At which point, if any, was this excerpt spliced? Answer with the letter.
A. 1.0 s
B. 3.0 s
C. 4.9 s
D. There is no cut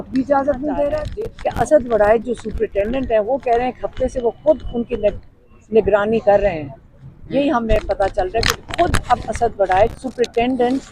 A